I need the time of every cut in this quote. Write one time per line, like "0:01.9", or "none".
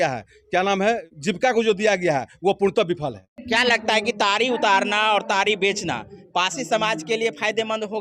0:01.0
0:03.3